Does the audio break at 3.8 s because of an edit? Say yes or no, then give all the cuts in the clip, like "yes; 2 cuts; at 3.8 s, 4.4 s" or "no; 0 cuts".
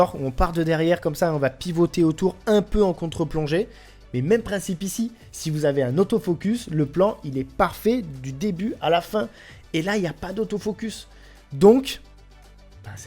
no; 0 cuts